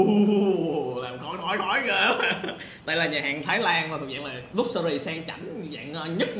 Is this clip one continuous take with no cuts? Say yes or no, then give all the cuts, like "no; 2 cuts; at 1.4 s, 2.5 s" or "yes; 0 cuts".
yes; 0 cuts